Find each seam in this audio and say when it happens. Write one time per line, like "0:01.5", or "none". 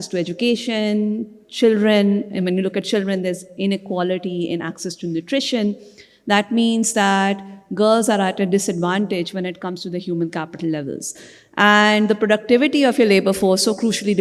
none

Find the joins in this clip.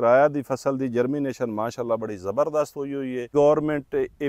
0:03.3

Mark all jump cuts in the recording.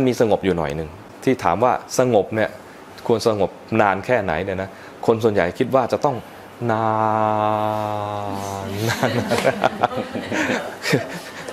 0:01.1

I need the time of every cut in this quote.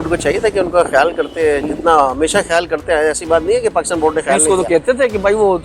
none

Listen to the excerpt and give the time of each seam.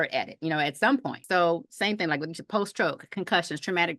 0:01.2

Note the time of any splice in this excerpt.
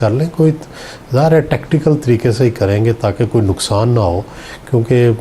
none

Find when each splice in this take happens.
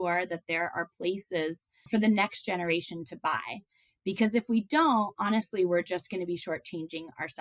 0:01.9

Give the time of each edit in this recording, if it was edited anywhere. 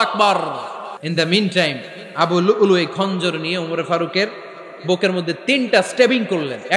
0:01.0

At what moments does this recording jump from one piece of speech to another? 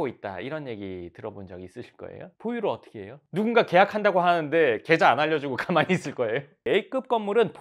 0:03.2
0:06.6

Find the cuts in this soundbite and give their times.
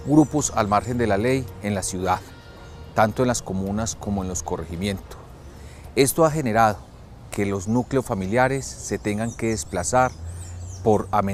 none

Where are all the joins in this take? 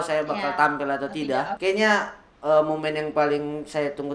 0:01.5

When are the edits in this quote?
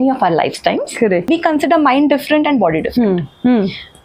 0:01.2

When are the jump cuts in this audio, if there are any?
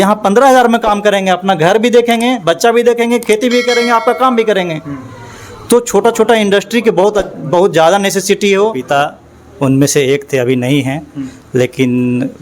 0:08.8

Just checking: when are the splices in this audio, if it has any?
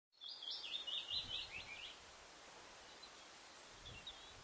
0:02.8

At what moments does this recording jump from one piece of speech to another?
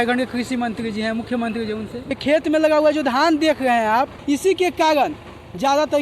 0:02.1
0:04.2

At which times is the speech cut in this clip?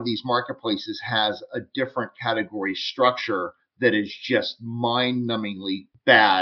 none

